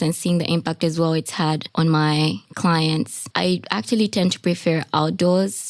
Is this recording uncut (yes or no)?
no